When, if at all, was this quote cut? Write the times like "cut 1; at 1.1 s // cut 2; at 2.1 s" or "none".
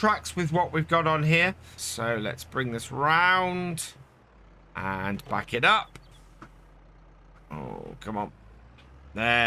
cut 1; at 1.7 s